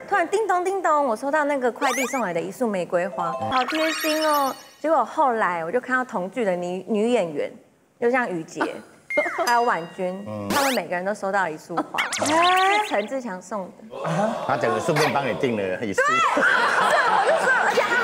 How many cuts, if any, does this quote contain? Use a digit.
1